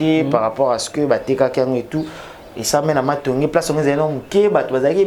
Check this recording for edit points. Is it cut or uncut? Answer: uncut